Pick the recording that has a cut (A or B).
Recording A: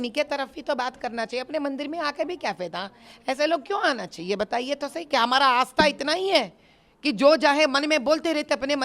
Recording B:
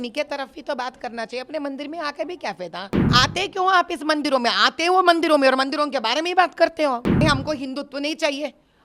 B